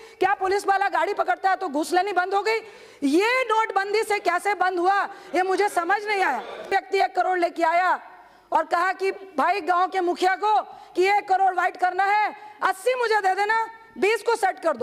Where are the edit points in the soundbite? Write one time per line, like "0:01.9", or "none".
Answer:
0:06.6